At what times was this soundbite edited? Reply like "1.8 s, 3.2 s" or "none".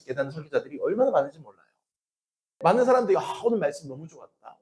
2.5 s